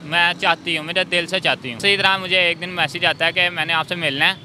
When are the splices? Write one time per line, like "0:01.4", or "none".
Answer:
0:01.8